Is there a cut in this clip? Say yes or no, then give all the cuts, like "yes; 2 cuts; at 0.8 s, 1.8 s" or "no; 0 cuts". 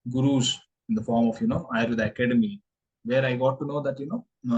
no; 0 cuts